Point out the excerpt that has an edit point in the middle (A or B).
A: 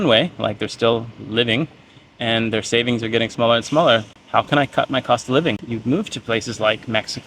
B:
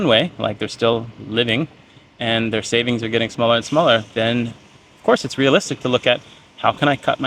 A